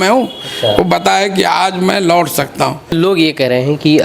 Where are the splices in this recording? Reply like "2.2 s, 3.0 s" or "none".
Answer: 2.9 s